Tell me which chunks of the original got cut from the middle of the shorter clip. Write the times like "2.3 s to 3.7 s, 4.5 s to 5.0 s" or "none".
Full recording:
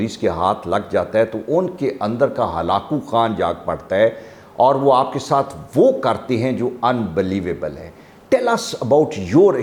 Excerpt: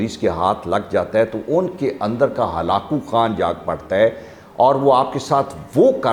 none

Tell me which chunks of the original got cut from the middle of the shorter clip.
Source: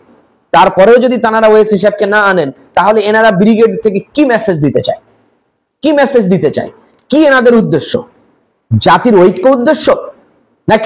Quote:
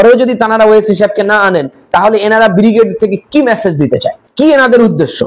5.0 s to 6.9 s

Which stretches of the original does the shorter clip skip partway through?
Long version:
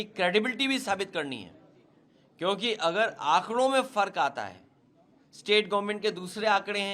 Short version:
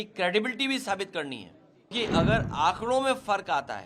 1.9 s to 2.6 s

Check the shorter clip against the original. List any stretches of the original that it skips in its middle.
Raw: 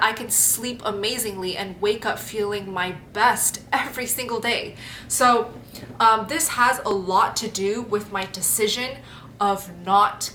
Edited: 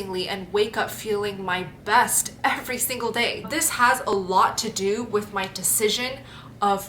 4.8 s to 6.3 s

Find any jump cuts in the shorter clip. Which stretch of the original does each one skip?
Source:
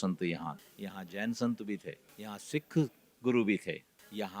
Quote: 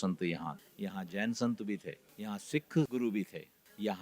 2.9 s to 3.2 s

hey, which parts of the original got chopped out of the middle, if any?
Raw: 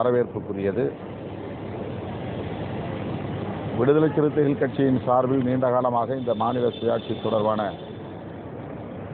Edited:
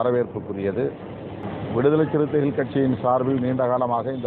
1.4 s to 3.4 s

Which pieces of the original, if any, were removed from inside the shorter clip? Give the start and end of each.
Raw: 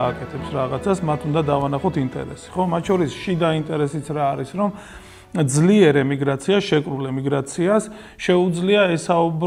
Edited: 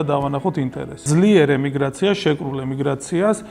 2.4 s to 5.5 s

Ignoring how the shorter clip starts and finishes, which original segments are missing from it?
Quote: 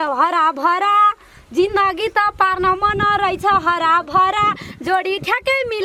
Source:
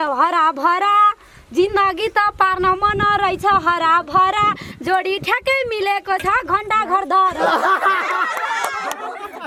none

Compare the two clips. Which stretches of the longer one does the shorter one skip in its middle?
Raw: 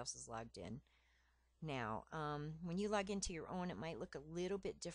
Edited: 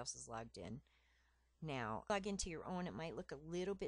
2.1 s to 2.9 s

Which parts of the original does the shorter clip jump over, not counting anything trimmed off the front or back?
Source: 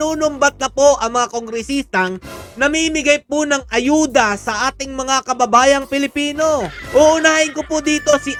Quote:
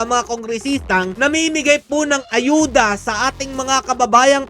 2.2 s to 2.5 s

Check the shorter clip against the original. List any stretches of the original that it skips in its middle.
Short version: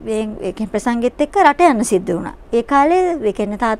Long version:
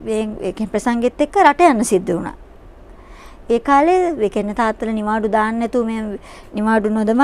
2.3 s to 3.3 s

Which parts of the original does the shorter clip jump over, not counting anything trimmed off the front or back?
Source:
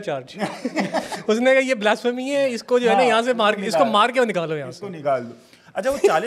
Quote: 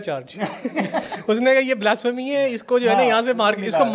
none

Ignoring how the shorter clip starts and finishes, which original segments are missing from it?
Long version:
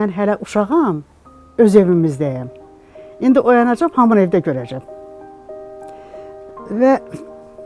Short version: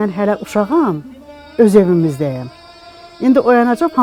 none

